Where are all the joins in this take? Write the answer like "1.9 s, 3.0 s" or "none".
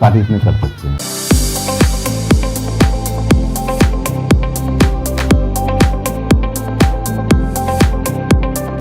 0.9 s